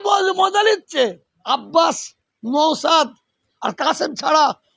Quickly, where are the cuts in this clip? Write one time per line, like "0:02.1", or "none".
0:01.3